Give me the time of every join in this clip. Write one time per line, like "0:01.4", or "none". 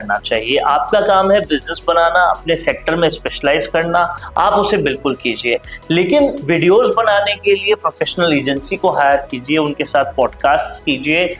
none

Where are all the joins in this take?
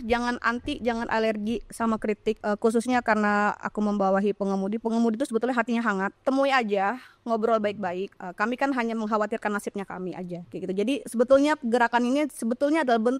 0:02.4
0:06.1
0:08.1
0:10.5

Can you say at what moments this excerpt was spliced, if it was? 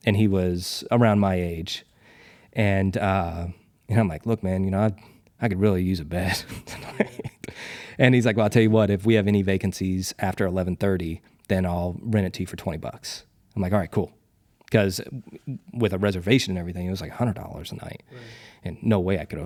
none

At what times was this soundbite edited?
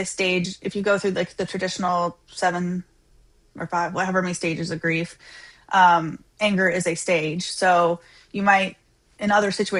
none

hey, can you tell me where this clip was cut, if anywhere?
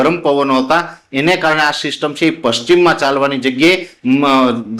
none

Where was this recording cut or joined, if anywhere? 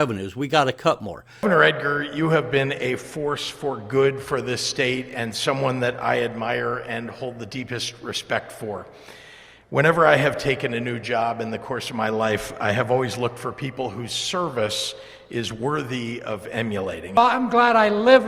0:01.2
0:17.0

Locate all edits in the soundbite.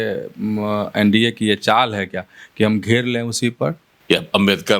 0:03.9

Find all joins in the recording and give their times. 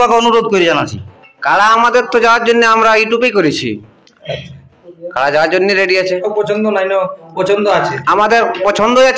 0:01.0
0:06.2

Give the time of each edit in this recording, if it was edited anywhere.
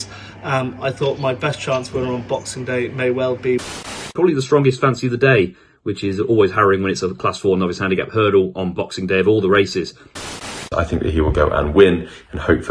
0:04.1
0:10.6

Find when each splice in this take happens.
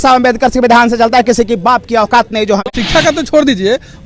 0:02.5

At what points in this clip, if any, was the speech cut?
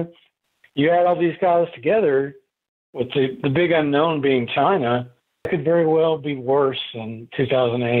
0:05.5

